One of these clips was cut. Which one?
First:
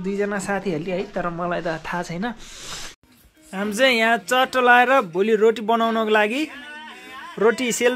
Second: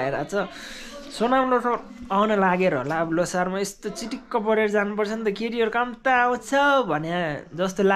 first; 1 cut; at 3.0 s

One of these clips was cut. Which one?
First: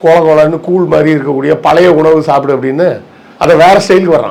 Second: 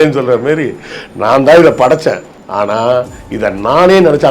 second; 1 cut; at 2.3 s

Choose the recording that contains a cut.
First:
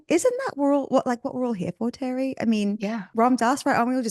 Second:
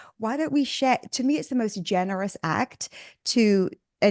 first; 1 cut; at 3.0 s

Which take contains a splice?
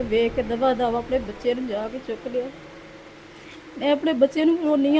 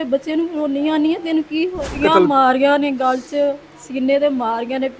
second; 1 cut; at 1.9 s

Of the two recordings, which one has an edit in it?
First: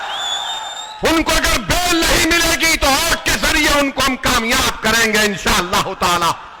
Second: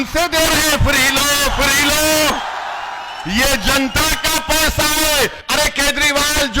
second; 1 cut; at 5.4 s

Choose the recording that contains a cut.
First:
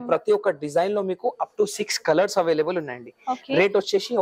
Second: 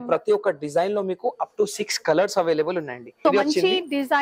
second; 1 cut; at 3.0 s

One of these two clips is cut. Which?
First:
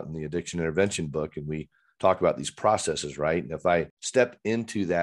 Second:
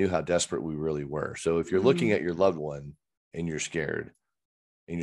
first; 1 cut; at 4.0 s

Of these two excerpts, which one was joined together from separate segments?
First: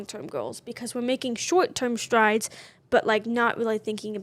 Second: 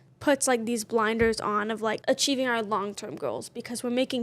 second; 1 cut; at 2.0 s

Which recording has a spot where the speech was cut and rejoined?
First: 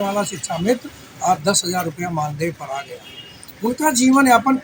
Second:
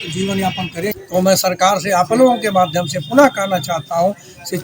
second; 1 cut; at 1.0 s

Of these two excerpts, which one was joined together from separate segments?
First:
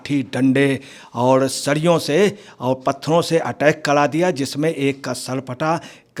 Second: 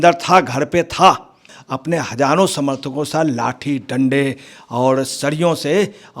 second; 1 cut; at 1.5 s

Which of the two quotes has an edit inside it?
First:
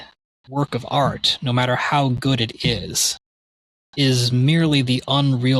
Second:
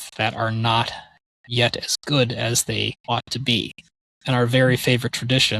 second; 1 cut; at 3.0 s

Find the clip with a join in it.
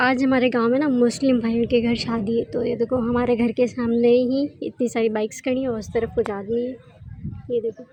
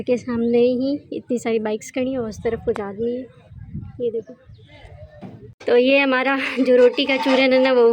second; 1 cut; at 5.4 s

